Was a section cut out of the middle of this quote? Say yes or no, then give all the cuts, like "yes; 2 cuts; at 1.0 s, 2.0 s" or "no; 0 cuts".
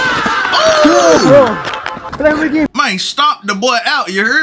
yes; 1 cut; at 2.7 s